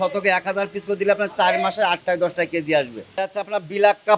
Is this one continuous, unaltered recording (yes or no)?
no